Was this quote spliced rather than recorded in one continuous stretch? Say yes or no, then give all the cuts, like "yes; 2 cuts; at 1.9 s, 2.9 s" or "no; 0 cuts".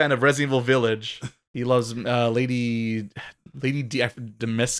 yes; 1 cut; at 3.4 s